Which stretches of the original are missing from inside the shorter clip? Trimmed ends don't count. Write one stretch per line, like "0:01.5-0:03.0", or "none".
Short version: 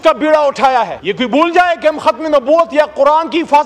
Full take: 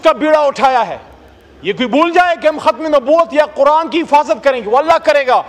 0:01.0-0:01.6